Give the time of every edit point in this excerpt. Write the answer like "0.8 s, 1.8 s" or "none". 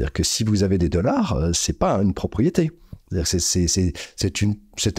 none